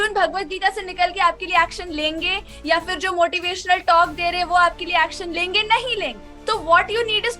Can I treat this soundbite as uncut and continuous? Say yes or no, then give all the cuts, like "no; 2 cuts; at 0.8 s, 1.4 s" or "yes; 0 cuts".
no; 1 cut; at 6.3 s